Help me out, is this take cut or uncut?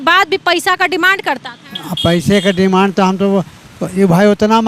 uncut